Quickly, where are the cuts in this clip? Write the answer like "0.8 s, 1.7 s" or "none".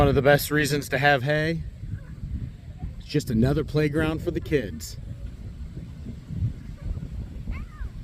none